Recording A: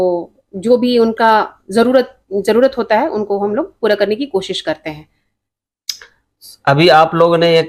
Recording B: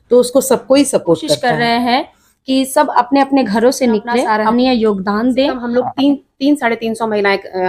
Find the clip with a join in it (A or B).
B